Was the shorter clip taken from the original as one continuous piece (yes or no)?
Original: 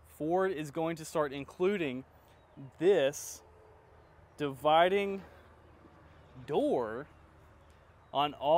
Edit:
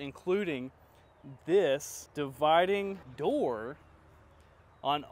no